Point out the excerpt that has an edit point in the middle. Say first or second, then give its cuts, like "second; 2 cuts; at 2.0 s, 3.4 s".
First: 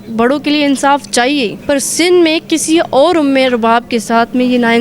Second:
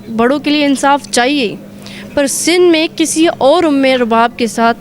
first; 1 cut; at 1.6 s